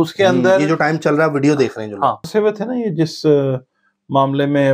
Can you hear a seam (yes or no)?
yes